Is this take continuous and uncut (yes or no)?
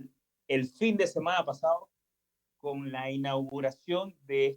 yes